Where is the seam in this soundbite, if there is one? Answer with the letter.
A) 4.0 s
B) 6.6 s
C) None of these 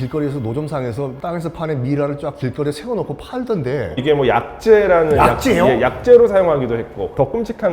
A